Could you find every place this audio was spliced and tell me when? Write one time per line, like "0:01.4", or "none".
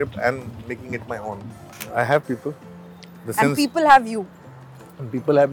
0:01.8